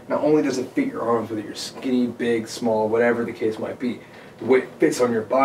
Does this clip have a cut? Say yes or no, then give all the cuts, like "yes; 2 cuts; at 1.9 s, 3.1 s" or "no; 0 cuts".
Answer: no; 0 cuts